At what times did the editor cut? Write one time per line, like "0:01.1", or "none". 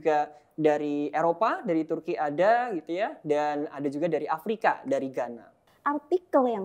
0:05.7